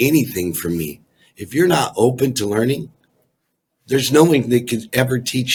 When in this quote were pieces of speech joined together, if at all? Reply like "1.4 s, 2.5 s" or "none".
none